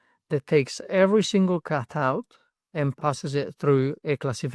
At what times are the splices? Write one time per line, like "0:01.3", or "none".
0:03.0